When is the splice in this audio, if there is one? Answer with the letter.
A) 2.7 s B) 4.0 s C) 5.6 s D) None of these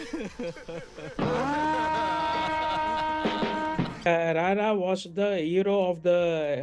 B